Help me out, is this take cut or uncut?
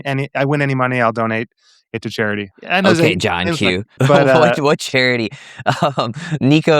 cut